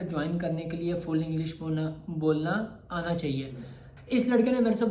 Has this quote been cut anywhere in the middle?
yes; 1 cut; at 3.8 s

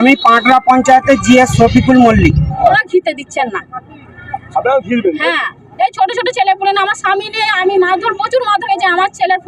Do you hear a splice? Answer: yes; 1 cut; at 2.8 s

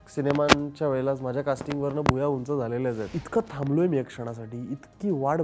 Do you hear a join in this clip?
yes; 1 cut; at 3.2 s

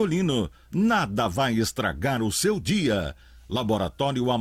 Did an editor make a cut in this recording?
no; 0 cuts

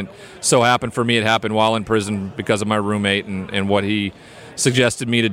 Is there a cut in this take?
no; 0 cuts

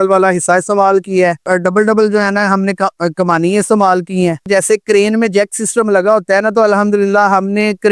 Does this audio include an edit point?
yes; 2 cuts; at 1.5 s, 4.5 s

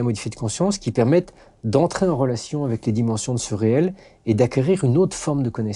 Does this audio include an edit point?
no; 0 cuts

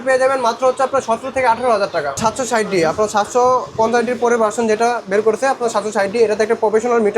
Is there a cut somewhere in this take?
yes; 1 cut; at 2.2 s

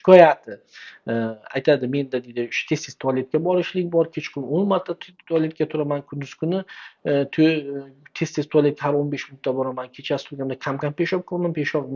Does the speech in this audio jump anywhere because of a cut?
no; 0 cuts

